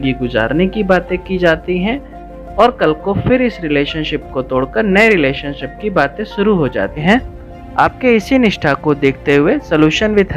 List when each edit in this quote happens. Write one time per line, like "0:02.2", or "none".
0:07.0